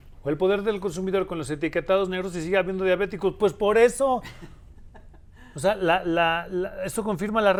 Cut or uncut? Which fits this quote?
uncut